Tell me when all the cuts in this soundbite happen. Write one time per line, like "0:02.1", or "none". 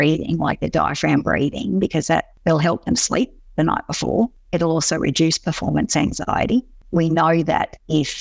0:02.3
0:04.4
0:06.8